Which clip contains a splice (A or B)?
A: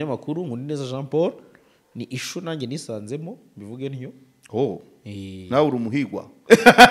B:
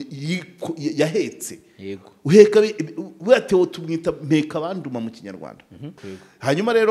B